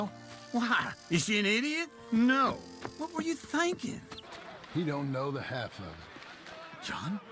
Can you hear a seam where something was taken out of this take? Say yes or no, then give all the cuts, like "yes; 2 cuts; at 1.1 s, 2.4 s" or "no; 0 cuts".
yes; 1 cut; at 4.1 s